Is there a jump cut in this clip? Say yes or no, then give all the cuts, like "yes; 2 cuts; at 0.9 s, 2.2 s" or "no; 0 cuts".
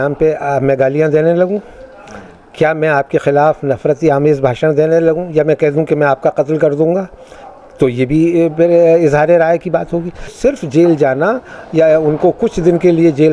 yes; 1 cut; at 10.3 s